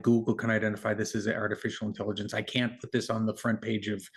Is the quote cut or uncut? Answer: uncut